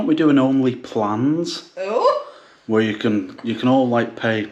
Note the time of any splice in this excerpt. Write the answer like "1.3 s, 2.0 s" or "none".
none